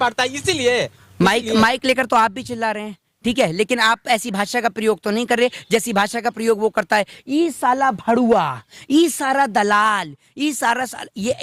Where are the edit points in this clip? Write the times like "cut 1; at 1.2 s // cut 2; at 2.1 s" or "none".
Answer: none